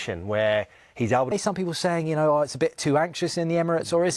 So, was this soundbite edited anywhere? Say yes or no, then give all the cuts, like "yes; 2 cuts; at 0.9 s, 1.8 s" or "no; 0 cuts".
yes; 1 cut; at 1.3 s